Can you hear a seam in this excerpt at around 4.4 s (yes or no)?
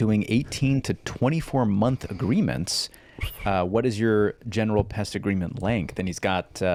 no